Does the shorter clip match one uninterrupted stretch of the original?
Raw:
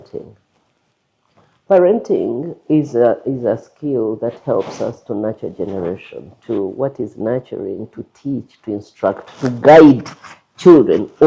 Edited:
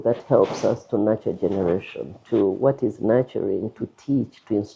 yes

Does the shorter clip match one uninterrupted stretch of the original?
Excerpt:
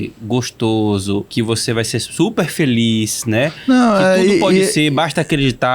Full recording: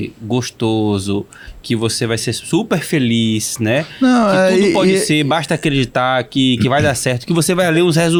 no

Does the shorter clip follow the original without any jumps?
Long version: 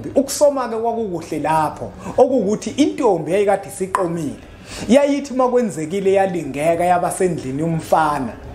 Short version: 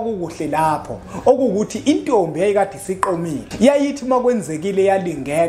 no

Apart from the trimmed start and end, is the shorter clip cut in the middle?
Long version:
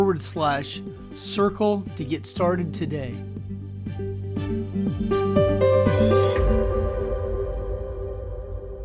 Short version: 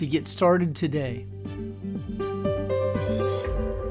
yes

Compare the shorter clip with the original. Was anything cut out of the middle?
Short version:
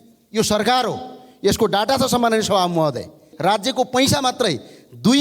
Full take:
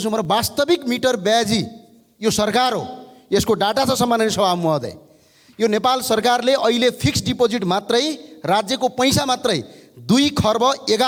yes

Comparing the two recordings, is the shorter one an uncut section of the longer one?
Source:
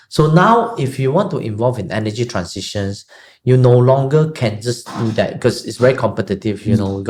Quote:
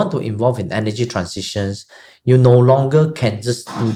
yes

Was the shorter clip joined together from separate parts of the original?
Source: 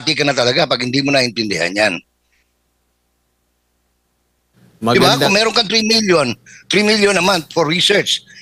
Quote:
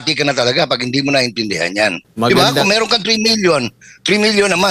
yes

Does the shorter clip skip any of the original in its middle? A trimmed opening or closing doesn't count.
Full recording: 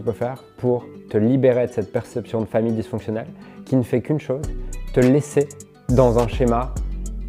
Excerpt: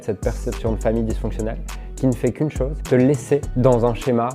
yes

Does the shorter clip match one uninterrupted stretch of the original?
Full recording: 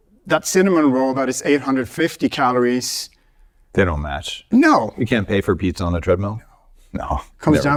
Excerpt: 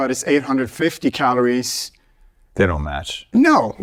yes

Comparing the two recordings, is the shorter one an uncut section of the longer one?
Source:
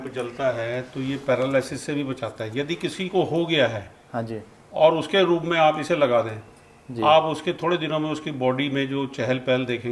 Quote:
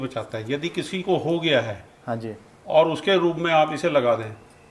yes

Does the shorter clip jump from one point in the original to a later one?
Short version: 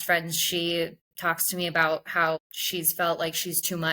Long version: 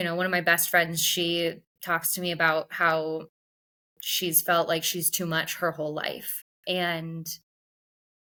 yes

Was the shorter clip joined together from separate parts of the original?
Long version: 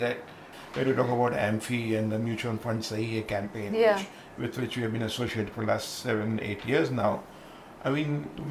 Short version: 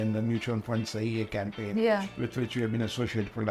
yes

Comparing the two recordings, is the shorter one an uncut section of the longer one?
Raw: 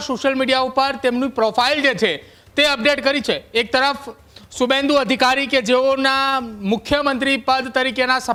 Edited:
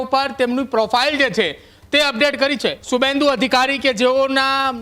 no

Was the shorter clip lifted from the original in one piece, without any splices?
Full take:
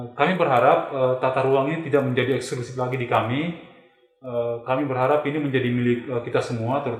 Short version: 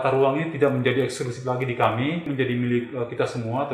no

